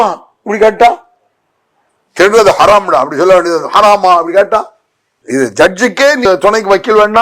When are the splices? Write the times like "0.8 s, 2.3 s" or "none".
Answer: 6.3 s